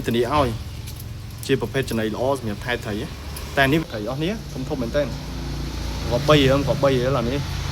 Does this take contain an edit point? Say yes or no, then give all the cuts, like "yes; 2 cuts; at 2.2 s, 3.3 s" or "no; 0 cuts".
yes; 1 cut; at 3.8 s